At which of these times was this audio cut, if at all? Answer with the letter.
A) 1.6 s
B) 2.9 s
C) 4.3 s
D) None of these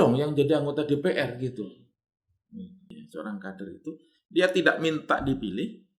B